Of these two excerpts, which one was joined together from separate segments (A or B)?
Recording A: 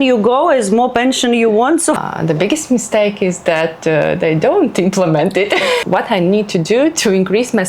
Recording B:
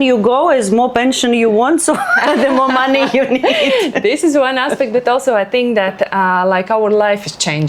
A